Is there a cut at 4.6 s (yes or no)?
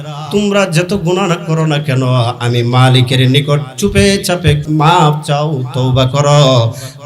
yes